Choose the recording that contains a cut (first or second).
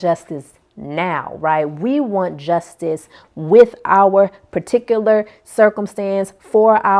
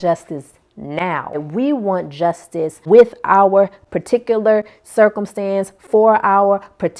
second